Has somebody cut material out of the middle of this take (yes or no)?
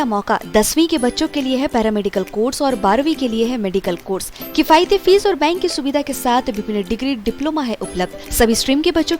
no